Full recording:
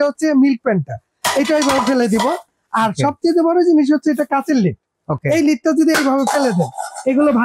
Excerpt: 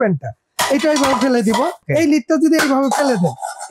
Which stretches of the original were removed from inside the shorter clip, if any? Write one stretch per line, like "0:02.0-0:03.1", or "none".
0:02.5-0:05.2